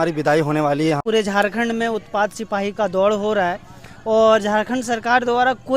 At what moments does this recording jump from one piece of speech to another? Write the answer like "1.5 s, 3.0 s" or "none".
1.0 s

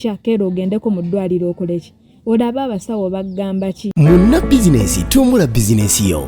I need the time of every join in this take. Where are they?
3.8 s

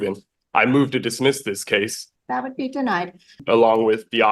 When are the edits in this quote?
2.0 s, 3.4 s

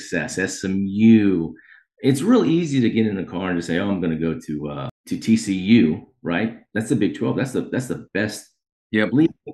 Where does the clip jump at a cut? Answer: 4.9 s

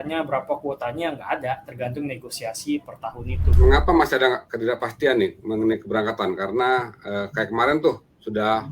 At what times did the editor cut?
3.5 s

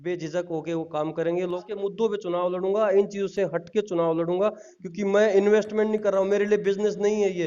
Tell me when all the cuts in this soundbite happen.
1.6 s

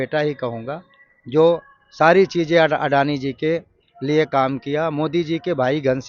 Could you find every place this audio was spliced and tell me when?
none

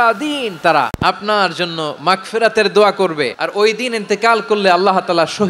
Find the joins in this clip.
0.9 s, 3.4 s

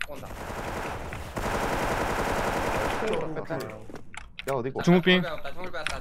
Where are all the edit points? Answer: 4.8 s

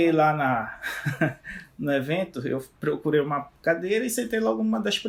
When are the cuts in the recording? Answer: none

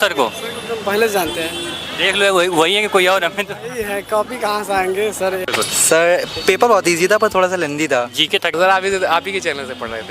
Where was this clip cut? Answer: 5.4 s, 8.5 s

